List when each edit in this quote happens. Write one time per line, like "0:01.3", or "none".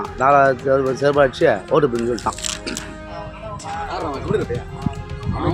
0:03.0

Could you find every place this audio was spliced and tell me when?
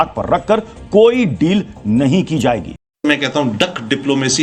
0:03.0

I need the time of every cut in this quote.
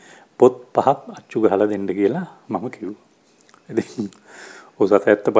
none

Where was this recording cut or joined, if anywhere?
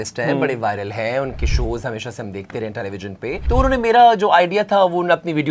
0:03.4

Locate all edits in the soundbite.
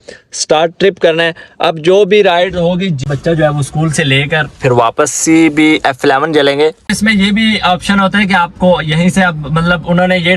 0:03.0
0:06.8

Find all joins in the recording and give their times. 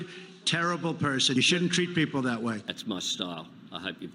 none

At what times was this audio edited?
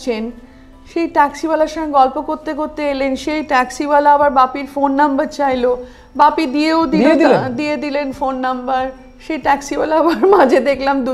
none

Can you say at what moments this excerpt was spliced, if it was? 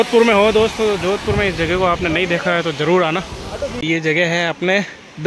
0:03.7

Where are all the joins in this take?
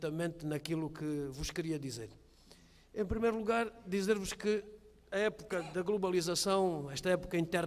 0:06.6

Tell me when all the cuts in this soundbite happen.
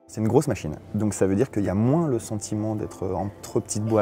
0:01.6

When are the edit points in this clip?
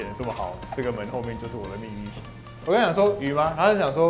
0:02.4

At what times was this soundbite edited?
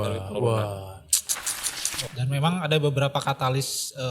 0:01.9

